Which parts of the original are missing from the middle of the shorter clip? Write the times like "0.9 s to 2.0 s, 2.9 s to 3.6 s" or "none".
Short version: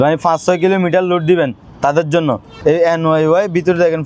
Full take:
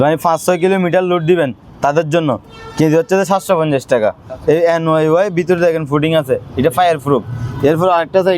2.5 s to 4.3 s

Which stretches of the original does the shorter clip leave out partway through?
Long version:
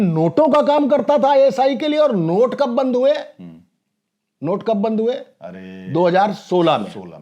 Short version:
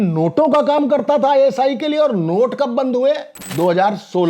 3.4 s to 5.7 s

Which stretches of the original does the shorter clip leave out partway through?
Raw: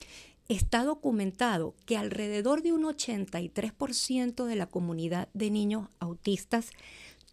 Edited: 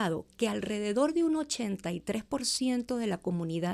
none

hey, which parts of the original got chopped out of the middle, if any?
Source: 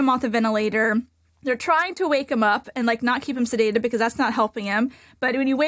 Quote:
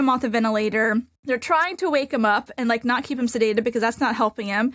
1.2 s to 1.3 s

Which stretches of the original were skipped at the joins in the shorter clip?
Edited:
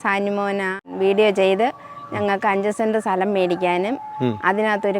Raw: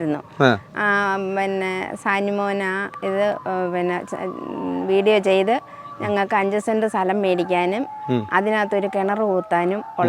2.9 s to 4.8 s

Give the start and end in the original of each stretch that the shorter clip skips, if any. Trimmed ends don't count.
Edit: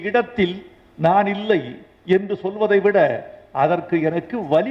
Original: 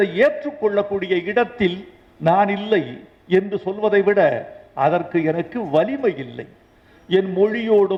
none

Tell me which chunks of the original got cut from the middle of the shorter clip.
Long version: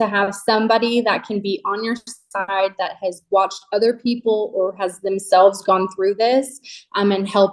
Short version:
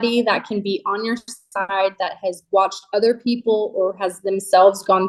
none

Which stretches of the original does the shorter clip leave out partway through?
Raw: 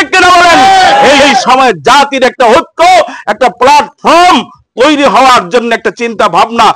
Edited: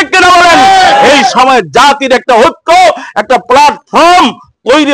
1.1 s to 1.2 s

